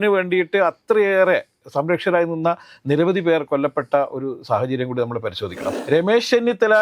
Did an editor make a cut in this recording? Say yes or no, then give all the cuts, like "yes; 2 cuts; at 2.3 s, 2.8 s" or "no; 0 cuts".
yes; 1 cut; at 5.6 s